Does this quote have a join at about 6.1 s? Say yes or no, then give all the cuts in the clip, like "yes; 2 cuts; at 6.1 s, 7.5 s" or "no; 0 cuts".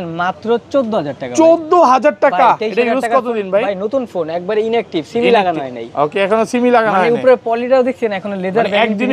no; 0 cuts